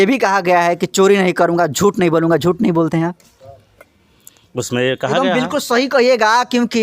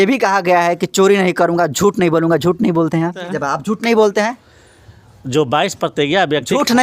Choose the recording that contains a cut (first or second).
second